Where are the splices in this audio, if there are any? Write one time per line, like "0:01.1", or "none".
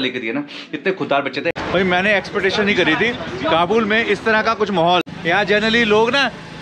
0:01.6
0:05.1